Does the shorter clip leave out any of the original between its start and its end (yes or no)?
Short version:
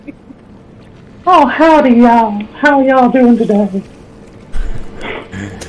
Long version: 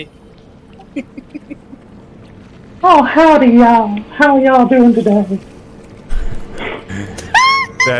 yes